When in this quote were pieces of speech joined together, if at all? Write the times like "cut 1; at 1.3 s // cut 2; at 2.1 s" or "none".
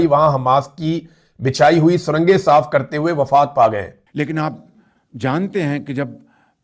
cut 1; at 4.0 s

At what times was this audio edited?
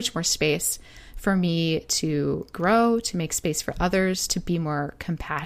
cut 1; at 2.5 s

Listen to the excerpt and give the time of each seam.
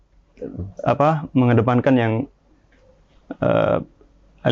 none

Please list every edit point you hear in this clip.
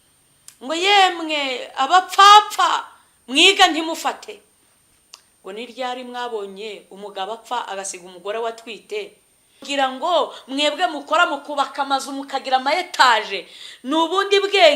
cut 1; at 9.7 s

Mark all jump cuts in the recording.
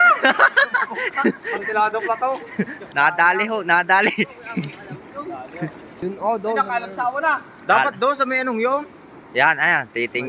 cut 1; at 2.9 s // cut 2; at 5.9 s

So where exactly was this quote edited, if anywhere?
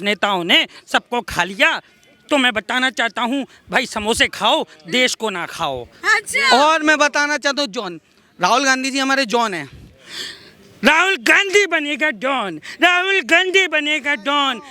none

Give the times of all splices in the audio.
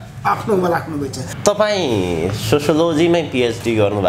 cut 1; at 1.3 s

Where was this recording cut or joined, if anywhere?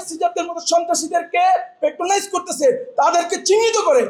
none

